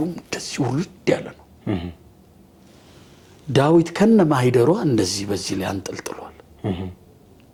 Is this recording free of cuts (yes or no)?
yes